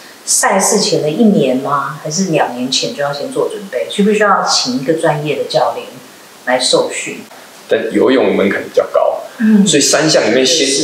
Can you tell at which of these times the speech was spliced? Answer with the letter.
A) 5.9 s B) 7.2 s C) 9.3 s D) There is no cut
B